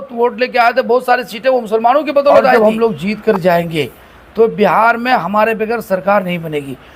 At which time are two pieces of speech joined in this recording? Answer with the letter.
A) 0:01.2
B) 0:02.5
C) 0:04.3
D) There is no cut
B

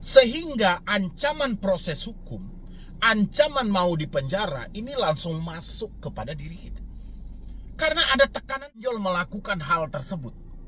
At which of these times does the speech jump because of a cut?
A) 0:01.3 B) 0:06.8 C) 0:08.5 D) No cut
C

